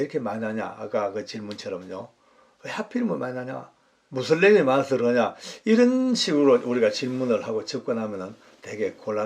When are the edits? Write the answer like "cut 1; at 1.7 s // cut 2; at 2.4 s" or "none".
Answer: none